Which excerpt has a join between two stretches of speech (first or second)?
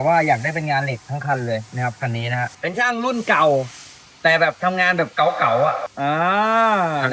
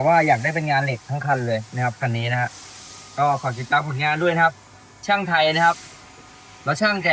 first